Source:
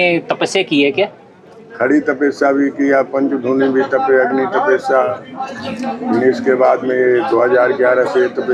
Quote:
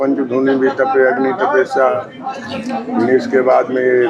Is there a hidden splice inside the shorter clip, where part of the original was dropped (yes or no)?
no